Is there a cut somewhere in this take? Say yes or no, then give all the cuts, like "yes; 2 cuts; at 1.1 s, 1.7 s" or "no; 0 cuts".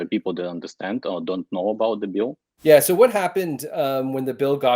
yes; 1 cut; at 2.5 s